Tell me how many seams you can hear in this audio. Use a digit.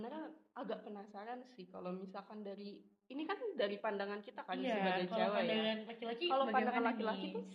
0